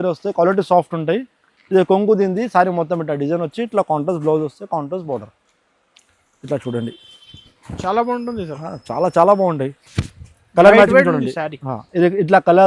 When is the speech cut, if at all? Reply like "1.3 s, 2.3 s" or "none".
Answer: none